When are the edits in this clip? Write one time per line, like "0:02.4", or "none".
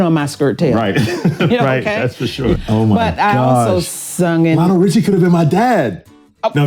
0:02.6

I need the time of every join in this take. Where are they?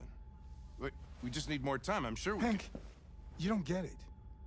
none

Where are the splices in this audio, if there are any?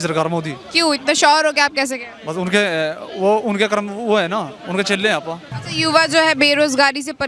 0:05.5

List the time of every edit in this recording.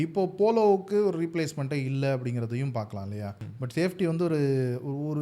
0:03.4

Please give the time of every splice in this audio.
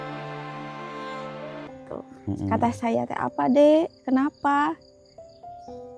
0:01.6

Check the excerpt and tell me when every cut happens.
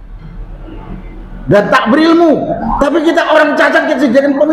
0:02.6

